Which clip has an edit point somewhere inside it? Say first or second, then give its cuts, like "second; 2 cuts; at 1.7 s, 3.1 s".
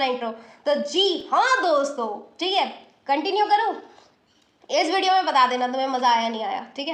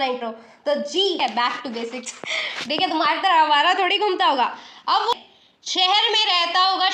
second; 2 cuts; at 1.2 s, 5.1 s